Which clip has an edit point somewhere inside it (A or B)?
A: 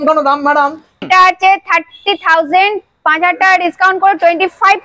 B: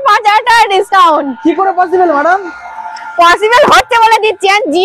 A